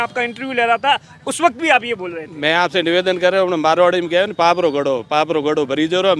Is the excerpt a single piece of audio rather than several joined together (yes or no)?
yes